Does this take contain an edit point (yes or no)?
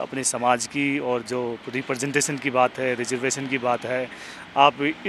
no